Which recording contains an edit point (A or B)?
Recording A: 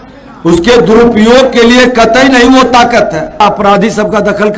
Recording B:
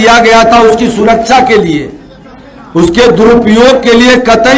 A